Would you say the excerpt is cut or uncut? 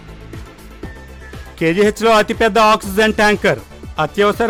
uncut